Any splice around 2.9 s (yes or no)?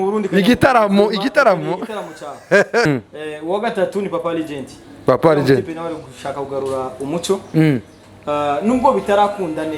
yes